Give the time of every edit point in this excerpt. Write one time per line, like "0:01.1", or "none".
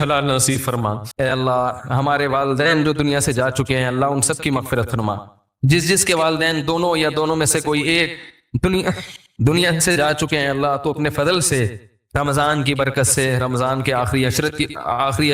0:01.0